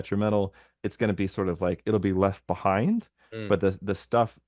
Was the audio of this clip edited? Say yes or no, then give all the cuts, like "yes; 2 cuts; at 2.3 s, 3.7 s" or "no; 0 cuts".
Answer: no; 0 cuts